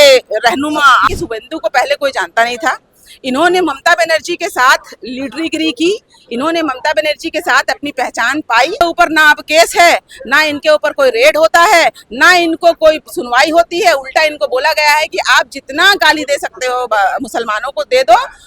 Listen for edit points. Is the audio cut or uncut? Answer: cut